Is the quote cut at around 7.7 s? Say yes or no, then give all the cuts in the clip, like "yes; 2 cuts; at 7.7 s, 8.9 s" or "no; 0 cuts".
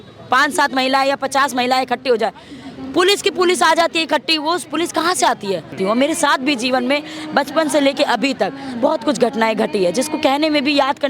no; 1 cut; at 5.7 s